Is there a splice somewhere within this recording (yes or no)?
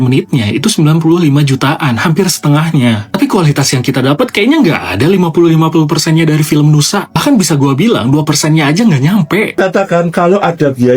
yes